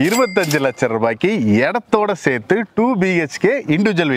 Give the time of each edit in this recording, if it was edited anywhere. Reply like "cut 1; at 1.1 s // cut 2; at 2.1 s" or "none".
none